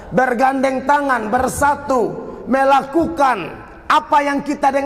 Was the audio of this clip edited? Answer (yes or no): no